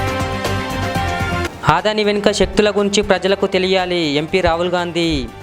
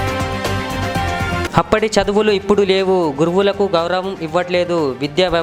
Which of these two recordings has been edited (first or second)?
first